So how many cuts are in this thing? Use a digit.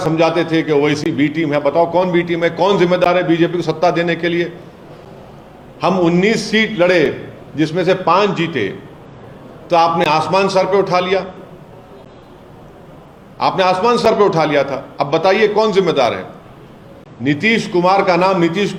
0